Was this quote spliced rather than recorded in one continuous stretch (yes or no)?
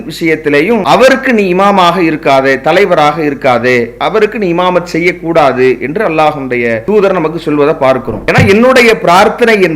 yes